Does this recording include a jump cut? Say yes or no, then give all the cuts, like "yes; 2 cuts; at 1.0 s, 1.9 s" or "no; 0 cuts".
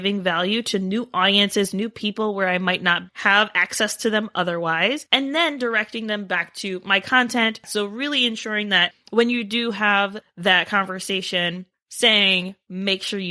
yes; 2 cuts; at 7.6 s, 11.7 s